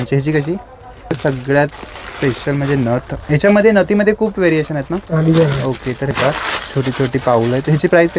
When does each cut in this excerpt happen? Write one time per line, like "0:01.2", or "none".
0:01.2
0:06.1